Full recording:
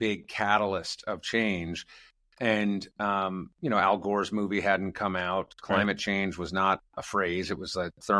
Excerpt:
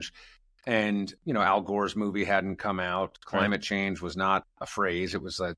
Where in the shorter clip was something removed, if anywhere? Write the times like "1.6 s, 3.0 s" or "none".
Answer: 1.2 s